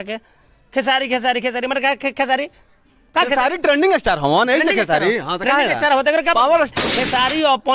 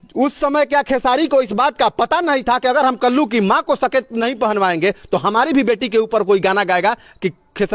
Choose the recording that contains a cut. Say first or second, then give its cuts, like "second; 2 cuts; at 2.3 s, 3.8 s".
first; 1 cut; at 6.7 s